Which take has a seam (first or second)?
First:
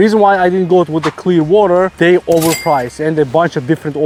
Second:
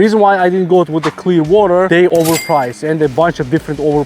second